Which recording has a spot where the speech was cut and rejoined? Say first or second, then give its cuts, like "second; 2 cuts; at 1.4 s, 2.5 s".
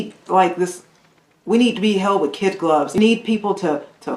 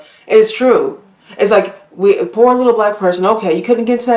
first; 1 cut; at 3.0 s